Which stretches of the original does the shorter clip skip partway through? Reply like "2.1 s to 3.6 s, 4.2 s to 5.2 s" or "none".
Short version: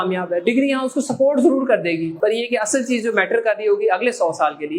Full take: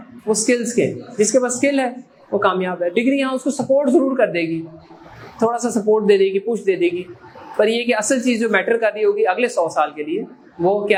4.6 s to 7.5 s